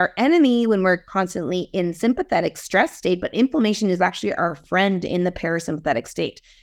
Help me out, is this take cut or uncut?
uncut